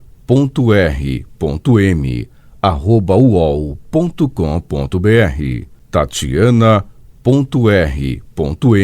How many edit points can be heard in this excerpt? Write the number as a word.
one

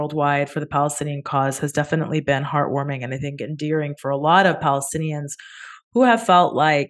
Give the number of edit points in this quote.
zero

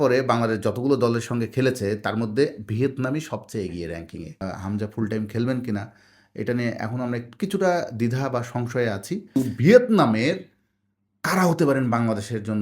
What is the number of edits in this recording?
two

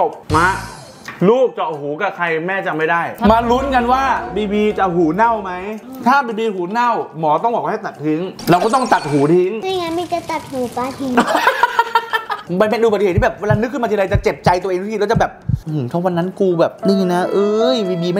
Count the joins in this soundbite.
four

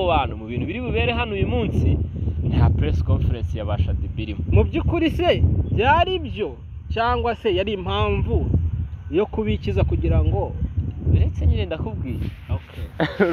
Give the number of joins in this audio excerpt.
zero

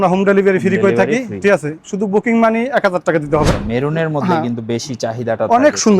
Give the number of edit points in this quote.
one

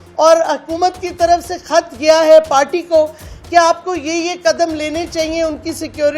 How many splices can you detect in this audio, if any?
zero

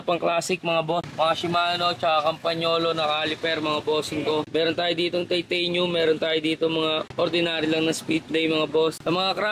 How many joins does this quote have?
two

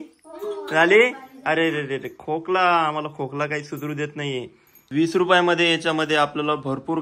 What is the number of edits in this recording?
one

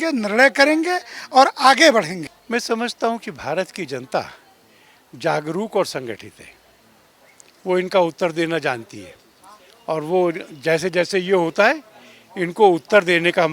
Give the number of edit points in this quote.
one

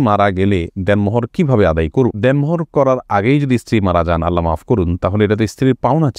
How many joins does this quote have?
zero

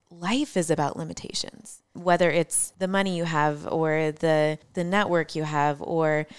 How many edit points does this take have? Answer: three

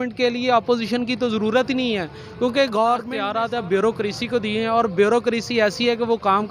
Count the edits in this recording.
one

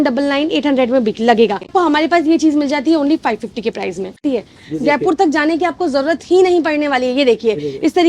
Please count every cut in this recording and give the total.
two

